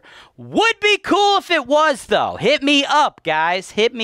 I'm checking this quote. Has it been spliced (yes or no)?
no